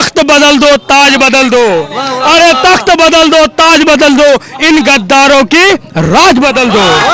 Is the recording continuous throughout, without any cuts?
yes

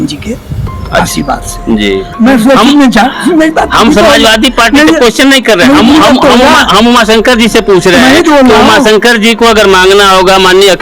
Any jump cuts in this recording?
yes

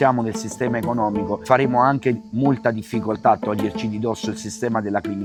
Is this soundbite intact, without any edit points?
yes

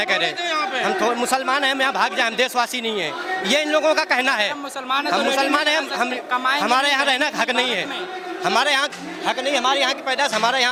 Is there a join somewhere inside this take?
no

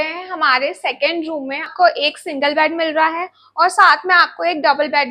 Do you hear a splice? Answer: yes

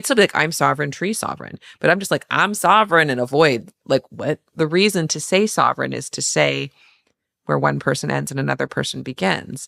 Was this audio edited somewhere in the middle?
yes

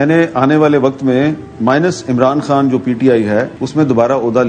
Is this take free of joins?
no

